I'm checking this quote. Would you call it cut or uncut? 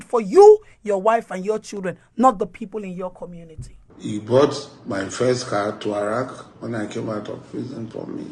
uncut